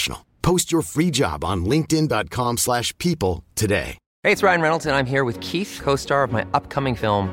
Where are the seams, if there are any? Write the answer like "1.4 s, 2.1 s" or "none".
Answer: 4.0 s